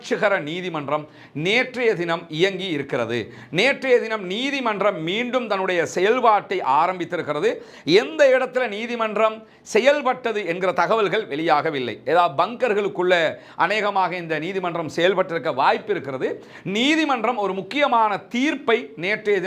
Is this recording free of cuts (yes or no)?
yes